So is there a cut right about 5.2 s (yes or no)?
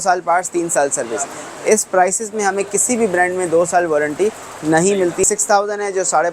yes